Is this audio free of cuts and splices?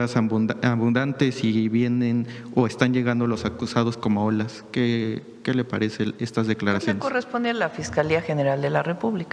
yes; 0 cuts

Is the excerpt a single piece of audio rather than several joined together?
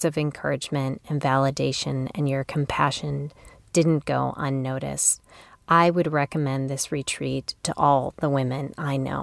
no; 1 cut; at 7.7 s

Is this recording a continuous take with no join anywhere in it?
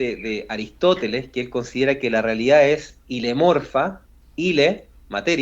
no; 2 cuts; at 3.0 s, 4.2 s

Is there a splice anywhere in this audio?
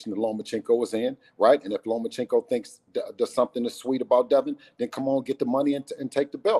no; 0 cuts

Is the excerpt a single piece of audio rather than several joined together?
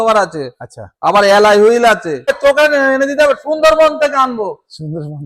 no; 1 cut; at 2.3 s

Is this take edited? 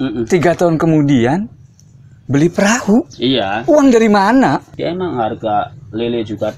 yes; 1 cut; at 4.7 s

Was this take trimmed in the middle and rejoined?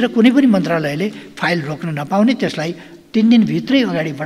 no; 0 cuts

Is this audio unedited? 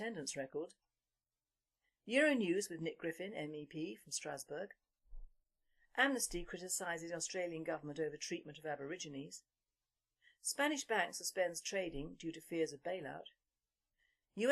no; 1 cut; at 4.0 s

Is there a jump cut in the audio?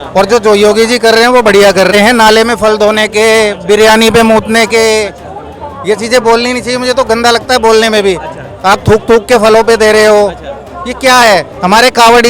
yes; 1 cut; at 1.9 s

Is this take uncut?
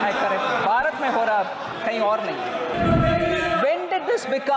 no; 1 cut; at 2.7 s

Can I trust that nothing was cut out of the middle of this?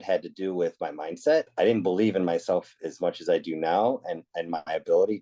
no; 1 cut; at 1.5 s

